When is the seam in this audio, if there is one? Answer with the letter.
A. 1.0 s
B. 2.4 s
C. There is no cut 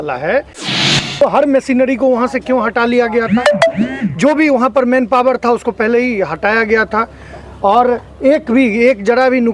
A